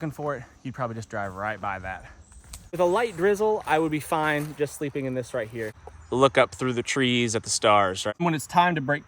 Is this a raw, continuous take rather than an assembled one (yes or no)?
no